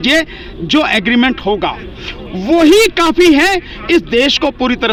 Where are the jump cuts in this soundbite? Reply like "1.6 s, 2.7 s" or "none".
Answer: none